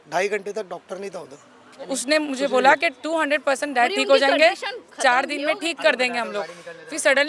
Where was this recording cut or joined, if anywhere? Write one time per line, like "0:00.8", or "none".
0:01.9